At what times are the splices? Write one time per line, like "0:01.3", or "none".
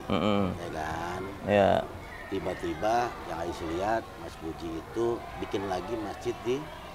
none